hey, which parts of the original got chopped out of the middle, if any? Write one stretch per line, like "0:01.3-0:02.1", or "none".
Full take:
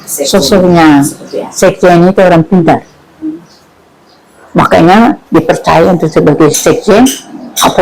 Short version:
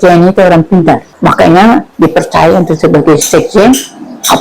0:02.9-0:04.4